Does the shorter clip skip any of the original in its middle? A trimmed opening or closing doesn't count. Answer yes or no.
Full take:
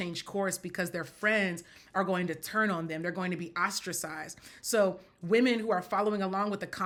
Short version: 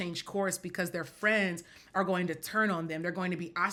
no